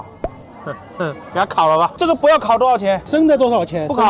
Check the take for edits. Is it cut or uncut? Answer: uncut